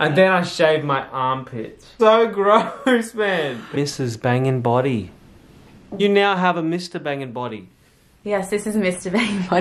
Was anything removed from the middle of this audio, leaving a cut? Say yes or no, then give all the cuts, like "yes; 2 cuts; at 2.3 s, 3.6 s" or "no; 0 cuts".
yes; 2 cuts; at 3.6 s, 5.9 s